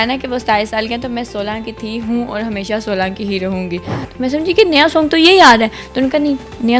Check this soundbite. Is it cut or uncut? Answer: cut